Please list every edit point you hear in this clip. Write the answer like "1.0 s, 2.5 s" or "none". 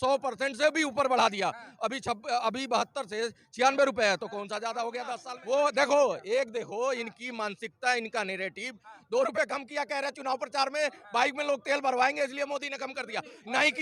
5.2 s